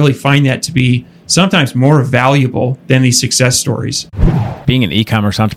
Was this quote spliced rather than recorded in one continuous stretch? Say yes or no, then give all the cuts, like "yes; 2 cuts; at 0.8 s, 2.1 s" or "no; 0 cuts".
yes; 1 cut; at 4.1 s